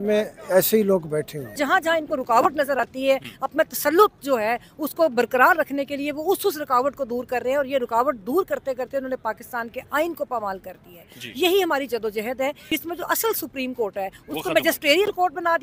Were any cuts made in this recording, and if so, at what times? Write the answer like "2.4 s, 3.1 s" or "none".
1.4 s, 12.6 s